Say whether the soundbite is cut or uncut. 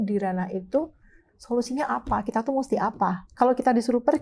uncut